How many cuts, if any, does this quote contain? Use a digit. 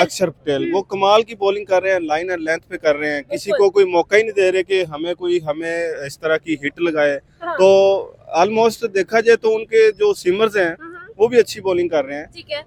0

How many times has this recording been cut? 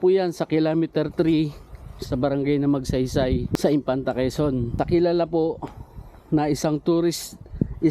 2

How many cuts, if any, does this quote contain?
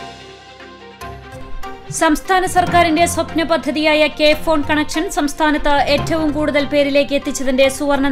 1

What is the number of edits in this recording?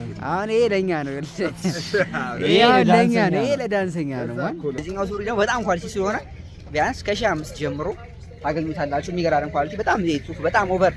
1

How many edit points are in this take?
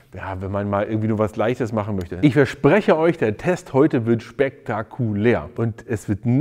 2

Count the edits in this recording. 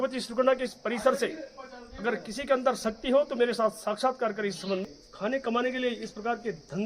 1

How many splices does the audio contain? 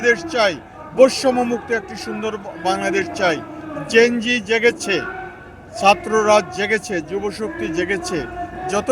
0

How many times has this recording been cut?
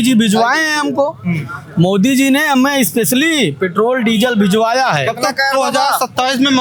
0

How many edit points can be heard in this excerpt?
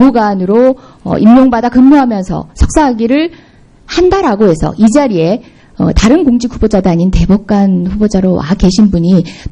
1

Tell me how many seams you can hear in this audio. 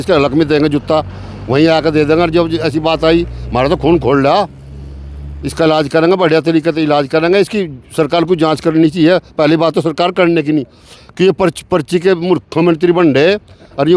0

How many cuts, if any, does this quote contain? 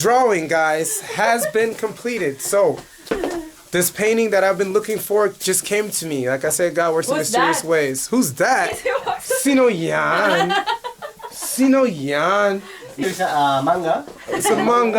1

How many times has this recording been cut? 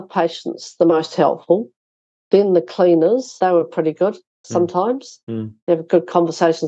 1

